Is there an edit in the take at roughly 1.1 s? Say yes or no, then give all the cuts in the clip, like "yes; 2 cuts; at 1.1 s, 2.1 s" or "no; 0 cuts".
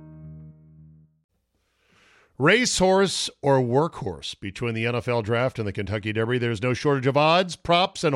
yes; 1 cut; at 1.1 s